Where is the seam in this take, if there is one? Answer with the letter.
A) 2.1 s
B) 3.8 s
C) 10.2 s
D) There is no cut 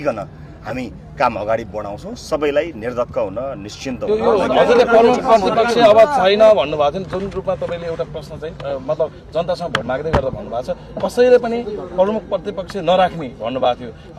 D